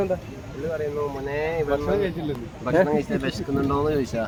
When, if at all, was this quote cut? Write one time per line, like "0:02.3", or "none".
none